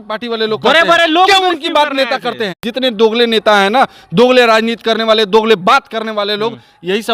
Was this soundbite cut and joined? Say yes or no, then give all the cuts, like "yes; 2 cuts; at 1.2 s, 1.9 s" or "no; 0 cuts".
yes; 1 cut; at 2.6 s